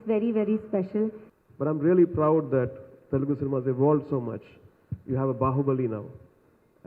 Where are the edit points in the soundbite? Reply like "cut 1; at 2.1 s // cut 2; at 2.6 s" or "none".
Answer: cut 1; at 1.3 s